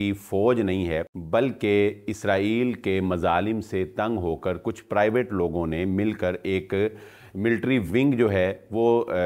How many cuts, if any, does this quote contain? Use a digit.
1